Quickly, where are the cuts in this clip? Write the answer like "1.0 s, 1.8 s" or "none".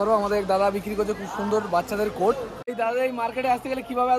2.7 s